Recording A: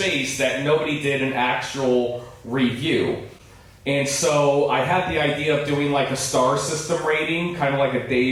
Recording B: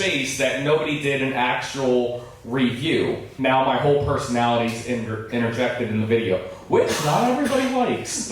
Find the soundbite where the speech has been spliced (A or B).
B